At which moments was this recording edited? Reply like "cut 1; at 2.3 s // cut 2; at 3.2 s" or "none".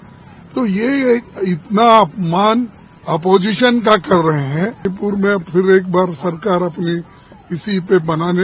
cut 1; at 4.9 s